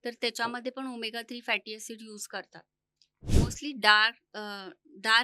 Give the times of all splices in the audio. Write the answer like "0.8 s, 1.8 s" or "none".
3.2 s